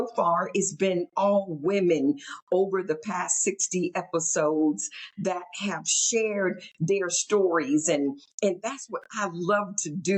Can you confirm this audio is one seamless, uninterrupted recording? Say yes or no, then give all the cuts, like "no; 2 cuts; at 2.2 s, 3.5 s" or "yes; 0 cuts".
yes; 0 cuts